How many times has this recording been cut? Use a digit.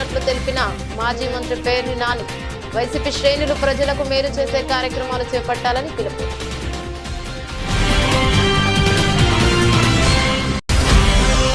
0